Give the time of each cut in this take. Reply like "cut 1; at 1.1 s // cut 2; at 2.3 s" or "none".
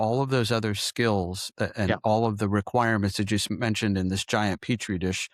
none